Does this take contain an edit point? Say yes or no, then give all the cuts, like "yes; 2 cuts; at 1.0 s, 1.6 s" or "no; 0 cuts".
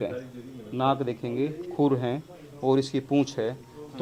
no; 0 cuts